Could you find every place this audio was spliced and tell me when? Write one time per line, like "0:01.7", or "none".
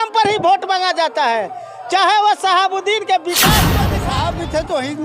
0:03.9

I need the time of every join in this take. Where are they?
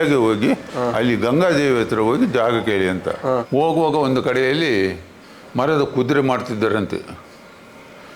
0:03.4

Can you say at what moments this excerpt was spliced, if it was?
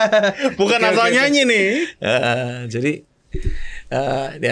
none

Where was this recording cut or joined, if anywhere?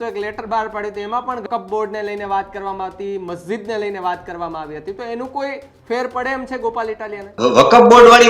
0:01.4
0:07.3

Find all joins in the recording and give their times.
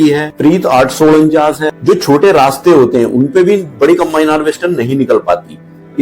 0:01.7

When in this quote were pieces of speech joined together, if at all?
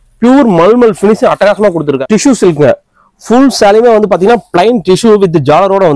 0:02.0

